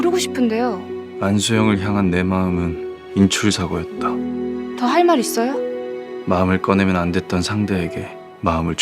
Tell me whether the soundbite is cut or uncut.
uncut